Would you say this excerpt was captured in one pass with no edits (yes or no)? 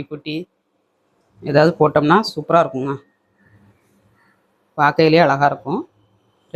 yes